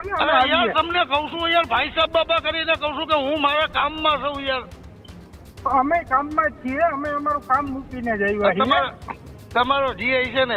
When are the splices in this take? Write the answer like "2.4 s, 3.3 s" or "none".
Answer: none